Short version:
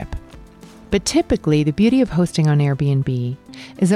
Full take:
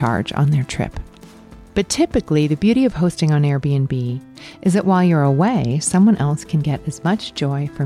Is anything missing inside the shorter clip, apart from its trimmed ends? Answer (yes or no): no